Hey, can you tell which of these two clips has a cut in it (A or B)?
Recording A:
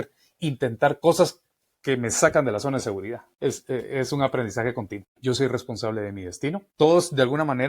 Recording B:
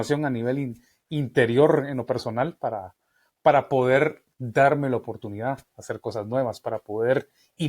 A